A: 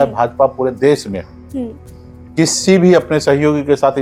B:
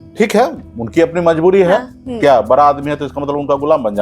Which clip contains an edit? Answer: B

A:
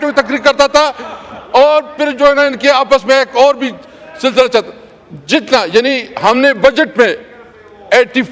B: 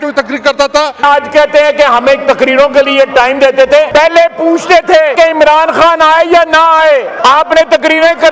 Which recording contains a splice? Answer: B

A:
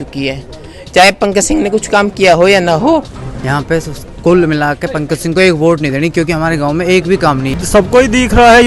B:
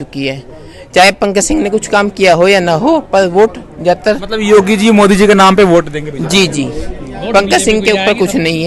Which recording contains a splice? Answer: A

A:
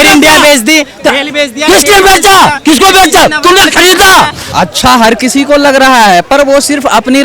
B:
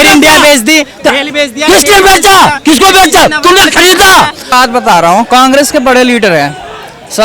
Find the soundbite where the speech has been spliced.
A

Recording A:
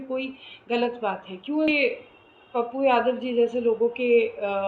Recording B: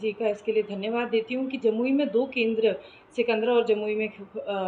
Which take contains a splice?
A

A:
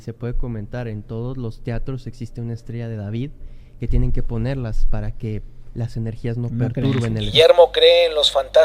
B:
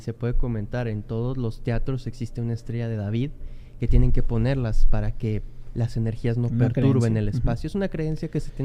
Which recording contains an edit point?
A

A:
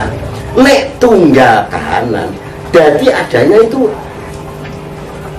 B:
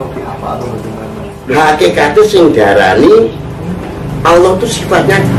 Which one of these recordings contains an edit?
B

